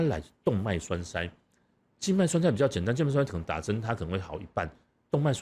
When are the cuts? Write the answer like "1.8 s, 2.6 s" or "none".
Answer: none

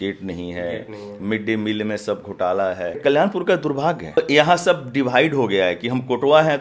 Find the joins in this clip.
3.0 s, 4.2 s

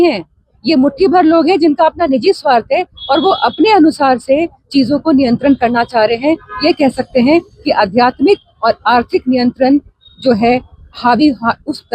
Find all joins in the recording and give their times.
none

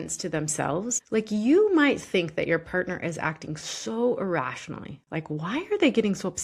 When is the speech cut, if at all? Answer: 1.0 s

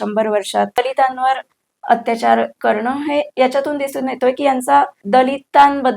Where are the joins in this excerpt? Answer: 0.8 s, 5.0 s

